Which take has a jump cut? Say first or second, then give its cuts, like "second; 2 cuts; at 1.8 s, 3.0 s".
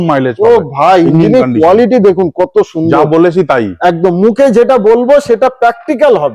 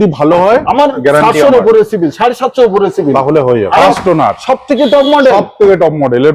second; 1 cut; at 3.8 s